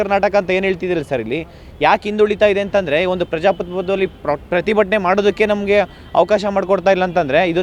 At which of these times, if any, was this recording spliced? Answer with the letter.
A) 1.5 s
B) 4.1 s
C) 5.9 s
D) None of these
D